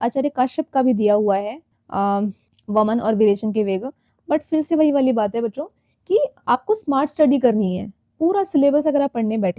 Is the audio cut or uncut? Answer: uncut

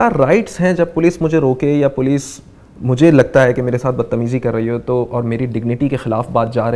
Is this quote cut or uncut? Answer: uncut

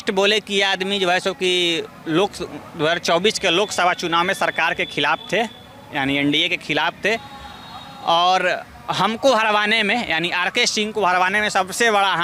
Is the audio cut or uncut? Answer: uncut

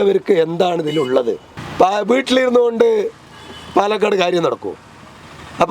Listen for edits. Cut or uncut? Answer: cut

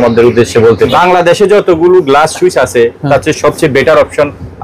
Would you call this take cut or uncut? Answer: cut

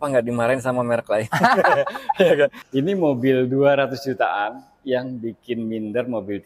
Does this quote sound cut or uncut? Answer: cut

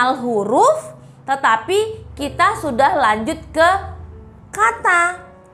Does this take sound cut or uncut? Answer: uncut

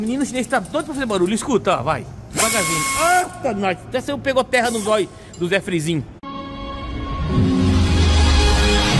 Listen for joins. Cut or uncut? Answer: cut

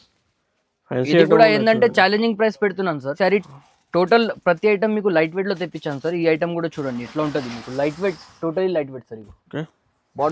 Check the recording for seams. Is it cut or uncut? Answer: cut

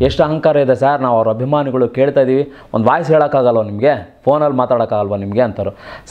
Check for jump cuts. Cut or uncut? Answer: uncut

